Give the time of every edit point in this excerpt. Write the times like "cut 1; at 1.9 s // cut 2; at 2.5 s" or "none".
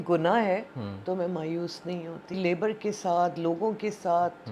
cut 1; at 2.3 s

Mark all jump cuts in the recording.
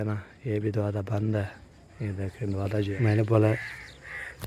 cut 1; at 2.9 s

